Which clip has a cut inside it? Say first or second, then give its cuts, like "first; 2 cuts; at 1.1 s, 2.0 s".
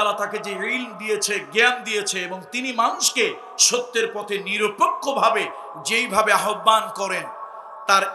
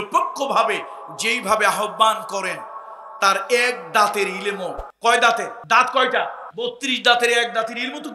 second; 3 cuts; at 4.8 s, 5.6 s, 6.4 s